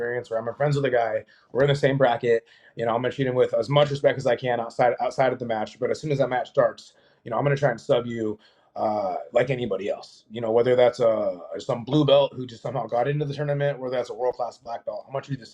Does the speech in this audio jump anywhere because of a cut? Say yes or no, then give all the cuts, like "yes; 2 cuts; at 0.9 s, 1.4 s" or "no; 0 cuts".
no; 0 cuts